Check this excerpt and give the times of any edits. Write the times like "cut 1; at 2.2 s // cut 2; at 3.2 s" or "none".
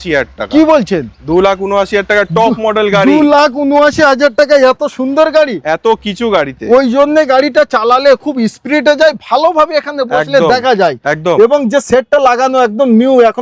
none

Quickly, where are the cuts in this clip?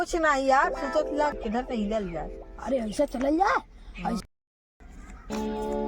cut 1; at 1.4 s // cut 2; at 4.2 s

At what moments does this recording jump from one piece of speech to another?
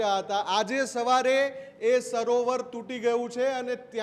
none

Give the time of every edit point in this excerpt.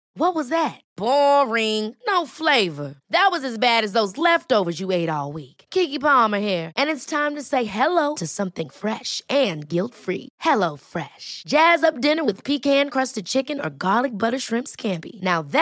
none

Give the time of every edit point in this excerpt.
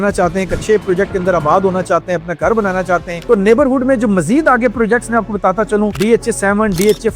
cut 1; at 3.2 s // cut 2; at 6.0 s

